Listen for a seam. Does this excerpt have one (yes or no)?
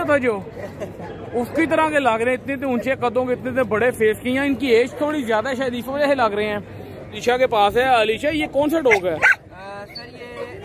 yes